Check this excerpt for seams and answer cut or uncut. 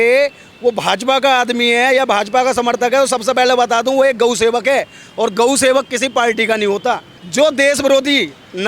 cut